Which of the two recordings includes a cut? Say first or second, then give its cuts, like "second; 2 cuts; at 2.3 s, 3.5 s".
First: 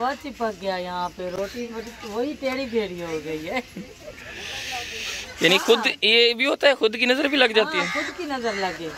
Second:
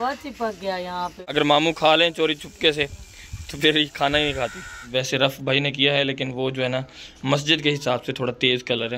second; 2 cuts; at 1.2 s, 4.8 s